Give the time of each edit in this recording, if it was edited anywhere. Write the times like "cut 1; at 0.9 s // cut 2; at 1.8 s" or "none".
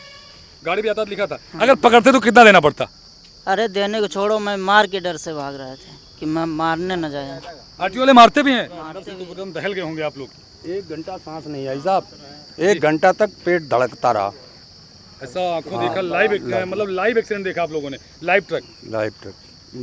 cut 1; at 8.9 s